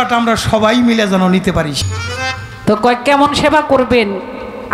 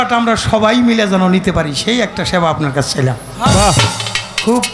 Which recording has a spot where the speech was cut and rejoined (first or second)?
first